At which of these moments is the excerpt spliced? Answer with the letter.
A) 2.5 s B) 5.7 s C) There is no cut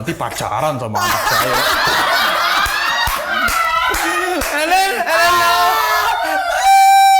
C